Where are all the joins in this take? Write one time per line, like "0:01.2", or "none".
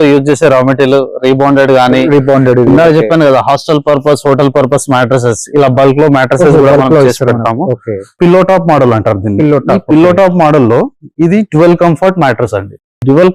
0:08.0